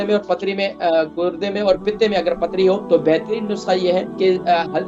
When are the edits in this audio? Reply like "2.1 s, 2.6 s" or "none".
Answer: 2.8 s, 4.1 s